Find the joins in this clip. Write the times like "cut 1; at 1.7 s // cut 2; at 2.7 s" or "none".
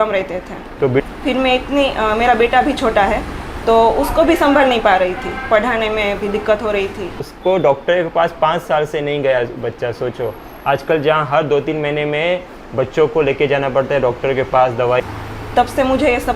cut 1; at 1.0 s // cut 2; at 7.2 s // cut 3; at 15.0 s